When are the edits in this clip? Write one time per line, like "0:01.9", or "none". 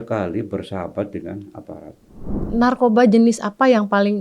0:02.4